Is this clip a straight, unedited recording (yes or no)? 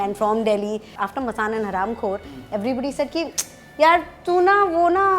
no